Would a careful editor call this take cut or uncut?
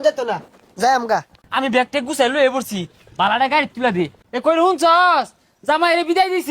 cut